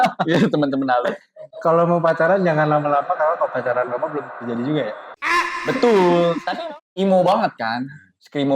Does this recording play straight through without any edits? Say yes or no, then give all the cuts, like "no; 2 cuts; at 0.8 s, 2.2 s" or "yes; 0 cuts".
no; 1 cut; at 6.5 s